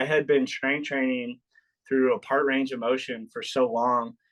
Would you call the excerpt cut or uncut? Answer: uncut